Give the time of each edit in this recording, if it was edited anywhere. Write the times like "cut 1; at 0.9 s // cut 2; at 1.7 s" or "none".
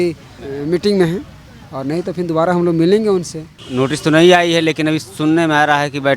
cut 1; at 3.6 s

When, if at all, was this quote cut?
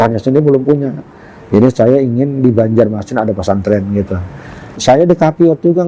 cut 1; at 4.7 s

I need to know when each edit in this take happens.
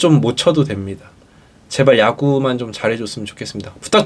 none

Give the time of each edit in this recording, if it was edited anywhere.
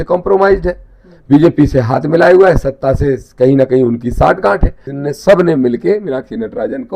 cut 1; at 4.8 s

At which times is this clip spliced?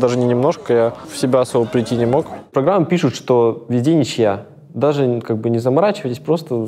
cut 1; at 1.1 s // cut 2; at 2.5 s

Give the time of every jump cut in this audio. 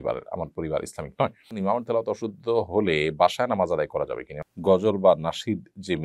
cut 1; at 1.5 s // cut 2; at 4.3 s

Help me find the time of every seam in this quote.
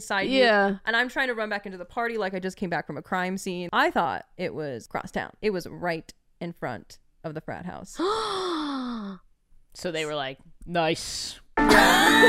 cut 1; at 3.6 s // cut 2; at 5.2 s

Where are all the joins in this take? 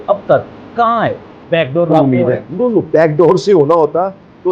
cut 1; at 1.4 s

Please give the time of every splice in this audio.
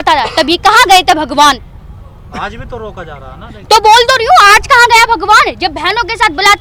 none

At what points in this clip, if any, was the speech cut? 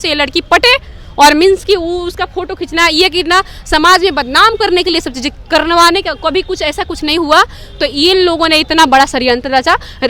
none

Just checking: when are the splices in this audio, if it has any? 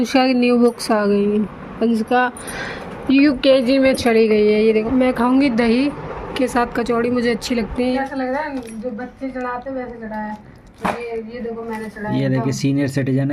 cut 1; at 4.9 s // cut 2; at 8.0 s

